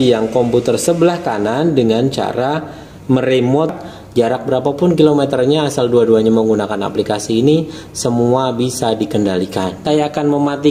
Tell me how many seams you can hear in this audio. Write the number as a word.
two